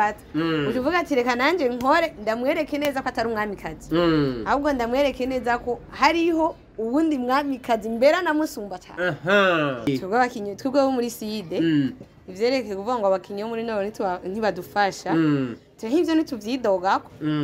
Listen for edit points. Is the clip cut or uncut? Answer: cut